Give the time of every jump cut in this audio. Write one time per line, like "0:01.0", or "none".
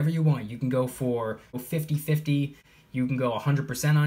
0:01.6
0:02.7